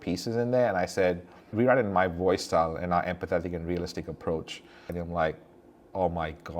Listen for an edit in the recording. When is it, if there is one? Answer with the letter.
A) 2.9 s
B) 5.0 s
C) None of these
B